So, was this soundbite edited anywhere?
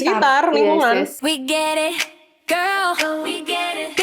yes; 1 cut; at 1.2 s

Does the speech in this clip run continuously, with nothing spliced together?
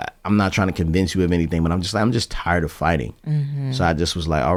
yes; 0 cuts

